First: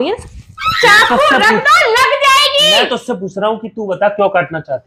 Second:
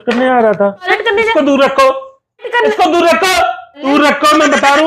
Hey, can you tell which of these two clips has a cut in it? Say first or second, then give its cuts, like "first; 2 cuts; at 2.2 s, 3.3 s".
second; 3 cuts; at 0.9 s, 2.5 s, 3.8 s